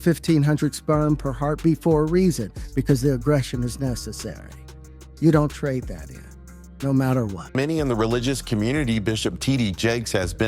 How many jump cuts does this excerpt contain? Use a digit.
1